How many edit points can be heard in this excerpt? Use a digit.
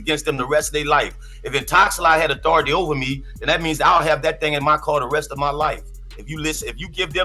0